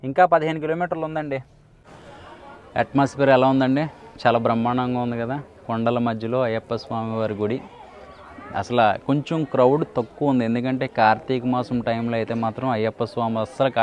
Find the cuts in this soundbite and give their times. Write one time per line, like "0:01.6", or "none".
0:01.6